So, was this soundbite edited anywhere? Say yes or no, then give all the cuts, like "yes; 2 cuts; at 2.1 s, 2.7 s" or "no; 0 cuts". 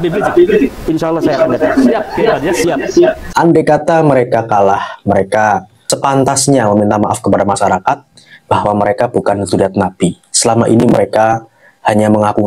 yes; 1 cut; at 3.2 s